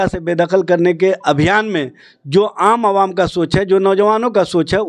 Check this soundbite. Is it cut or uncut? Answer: uncut